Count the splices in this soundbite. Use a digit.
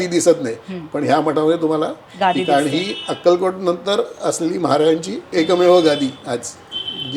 0